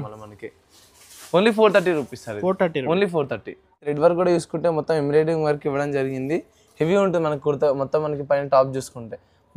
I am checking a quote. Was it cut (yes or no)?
yes